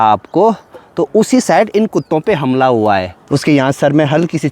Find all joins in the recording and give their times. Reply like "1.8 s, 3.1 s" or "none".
3.2 s